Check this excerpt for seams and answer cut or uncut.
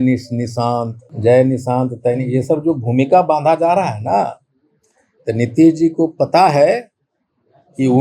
cut